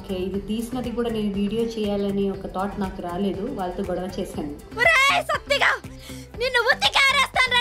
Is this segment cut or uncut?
uncut